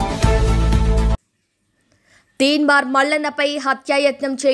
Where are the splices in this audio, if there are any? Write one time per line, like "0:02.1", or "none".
0:01.2